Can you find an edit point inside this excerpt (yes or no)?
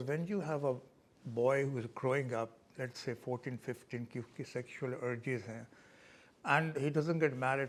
no